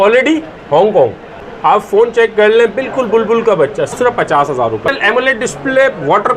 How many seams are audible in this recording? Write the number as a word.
three